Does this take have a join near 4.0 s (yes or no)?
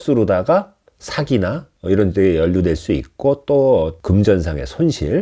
yes